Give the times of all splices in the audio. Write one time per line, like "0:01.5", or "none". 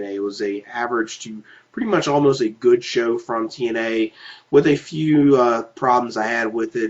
none